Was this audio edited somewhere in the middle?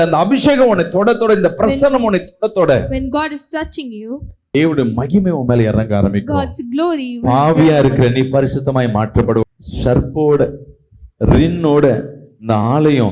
no; 0 cuts

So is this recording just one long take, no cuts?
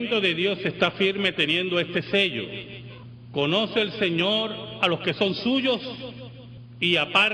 yes; 0 cuts

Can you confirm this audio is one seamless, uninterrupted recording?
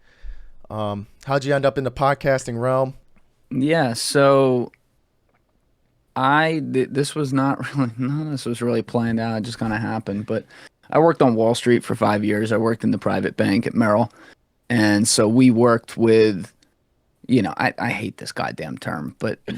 no; 1 cut; at 3.0 s

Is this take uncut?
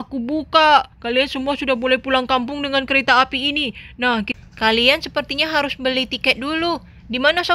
no; 1 cut; at 4.3 s

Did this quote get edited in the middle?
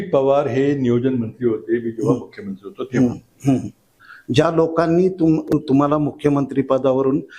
yes; 1 cut; at 4.0 s

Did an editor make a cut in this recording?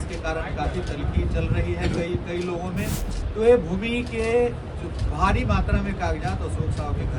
yes; 1 cut; at 3.1 s

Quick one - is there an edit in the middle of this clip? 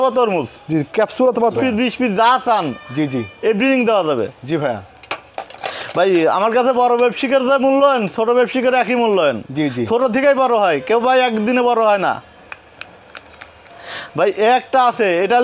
yes; 1 cut; at 1.5 s

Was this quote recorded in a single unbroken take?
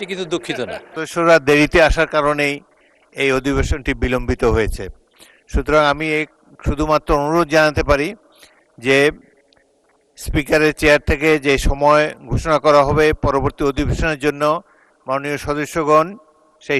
no; 1 cut; at 0.9 s

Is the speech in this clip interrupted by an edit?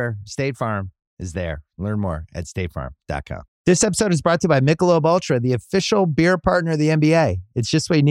yes; 1 cut; at 3.5 s

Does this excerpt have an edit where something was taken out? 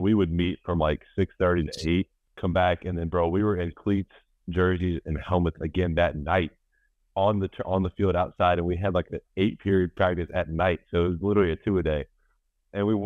yes; 1 cut; at 2.2 s

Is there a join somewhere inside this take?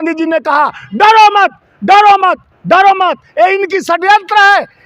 no; 0 cuts

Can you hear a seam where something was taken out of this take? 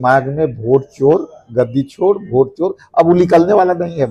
no; 0 cuts

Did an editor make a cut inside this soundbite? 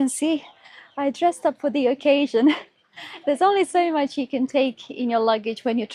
no; 0 cuts

